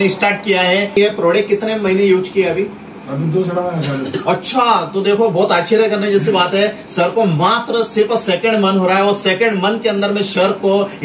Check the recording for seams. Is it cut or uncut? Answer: cut